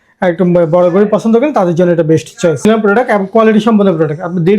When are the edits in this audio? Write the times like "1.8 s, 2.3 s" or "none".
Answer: 2.6 s